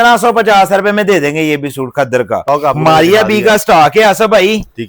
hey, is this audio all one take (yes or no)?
no